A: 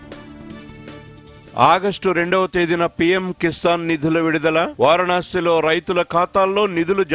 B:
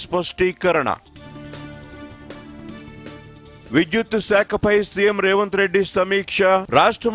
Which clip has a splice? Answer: A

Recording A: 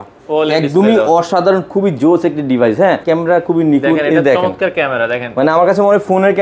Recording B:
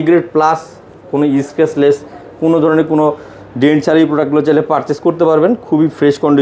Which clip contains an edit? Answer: A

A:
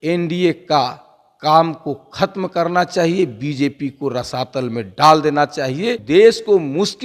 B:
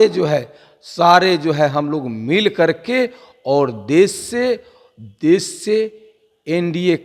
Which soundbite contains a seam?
A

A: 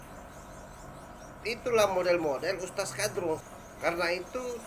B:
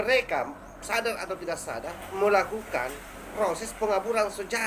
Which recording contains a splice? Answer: A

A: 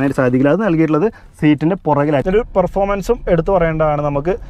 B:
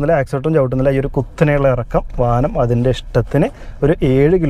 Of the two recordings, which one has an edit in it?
A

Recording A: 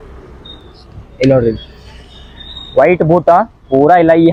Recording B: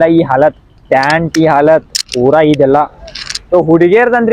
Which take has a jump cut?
B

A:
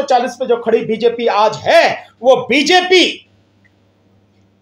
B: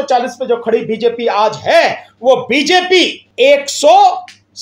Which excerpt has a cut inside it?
B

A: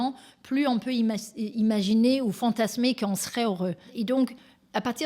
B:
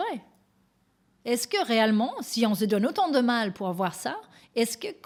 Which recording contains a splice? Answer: A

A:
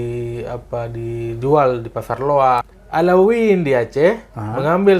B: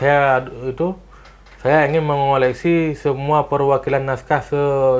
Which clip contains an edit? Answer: A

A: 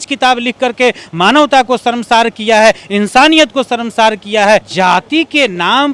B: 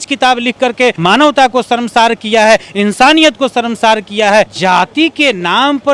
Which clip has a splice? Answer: B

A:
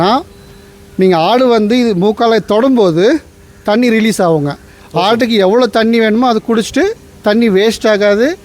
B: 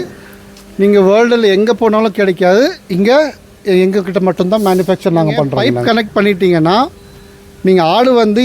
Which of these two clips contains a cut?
B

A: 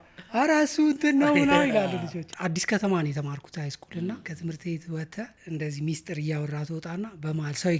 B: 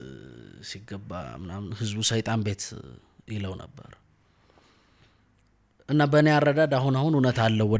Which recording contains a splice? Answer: A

